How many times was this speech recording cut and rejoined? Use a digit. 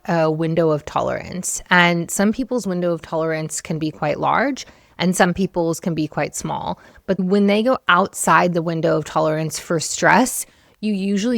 1